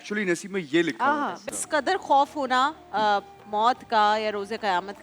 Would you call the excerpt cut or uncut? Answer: cut